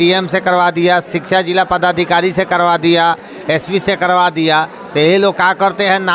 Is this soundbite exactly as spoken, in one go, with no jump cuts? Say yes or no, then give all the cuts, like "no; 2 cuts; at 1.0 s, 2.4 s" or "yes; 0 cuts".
yes; 0 cuts